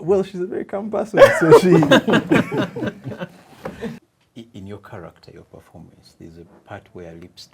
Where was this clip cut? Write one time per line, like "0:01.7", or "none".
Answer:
0:04.1